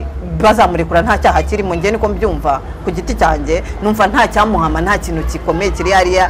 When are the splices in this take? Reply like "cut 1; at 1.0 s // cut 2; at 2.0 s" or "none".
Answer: none